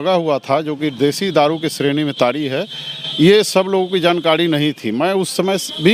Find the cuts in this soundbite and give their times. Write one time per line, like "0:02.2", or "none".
none